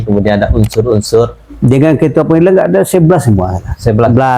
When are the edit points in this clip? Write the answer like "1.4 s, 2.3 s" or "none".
1.4 s